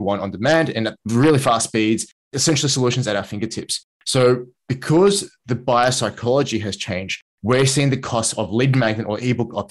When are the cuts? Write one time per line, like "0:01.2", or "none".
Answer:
0:01.0
0:02.3